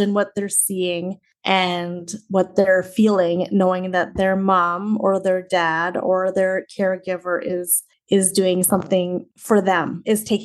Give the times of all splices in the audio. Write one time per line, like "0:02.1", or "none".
none